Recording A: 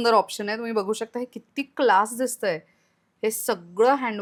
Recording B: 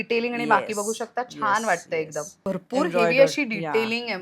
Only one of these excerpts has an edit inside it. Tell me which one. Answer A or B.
B